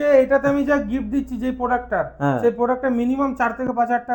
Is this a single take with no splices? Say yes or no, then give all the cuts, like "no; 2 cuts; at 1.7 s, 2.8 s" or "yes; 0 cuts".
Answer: yes; 0 cuts